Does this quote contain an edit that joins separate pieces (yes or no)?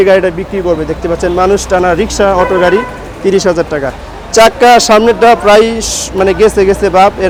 no